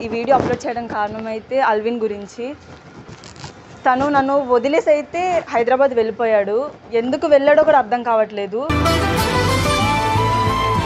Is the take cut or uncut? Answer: uncut